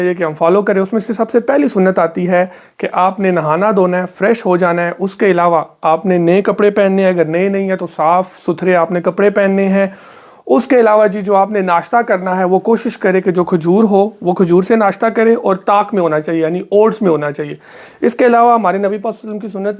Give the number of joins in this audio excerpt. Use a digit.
0